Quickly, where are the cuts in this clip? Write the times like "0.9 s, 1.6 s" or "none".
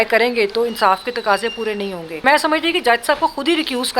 2.2 s